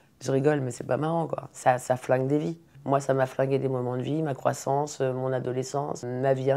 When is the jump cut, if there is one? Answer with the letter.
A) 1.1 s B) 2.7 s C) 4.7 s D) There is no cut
B